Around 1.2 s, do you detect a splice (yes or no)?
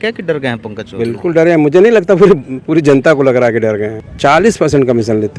no